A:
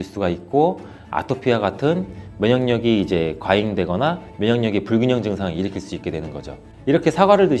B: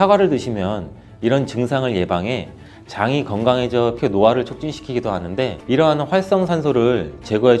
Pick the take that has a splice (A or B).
B